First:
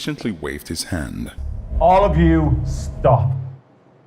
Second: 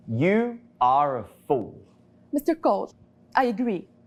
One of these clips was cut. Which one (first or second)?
first